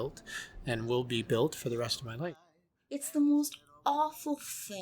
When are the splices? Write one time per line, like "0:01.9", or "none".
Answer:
0:02.4